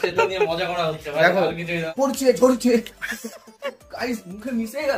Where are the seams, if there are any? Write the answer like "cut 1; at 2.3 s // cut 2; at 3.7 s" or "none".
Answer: cut 1; at 1.9 s